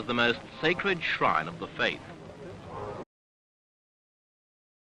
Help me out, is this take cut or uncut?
uncut